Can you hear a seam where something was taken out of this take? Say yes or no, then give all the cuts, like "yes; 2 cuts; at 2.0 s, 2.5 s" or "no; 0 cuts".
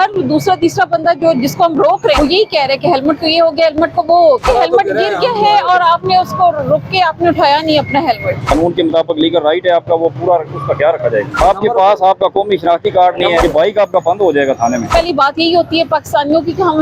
yes; 6 cuts; at 2.2 s, 4.4 s, 8.5 s, 11.4 s, 13.4 s, 14.9 s